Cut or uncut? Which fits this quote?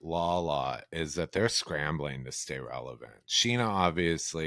uncut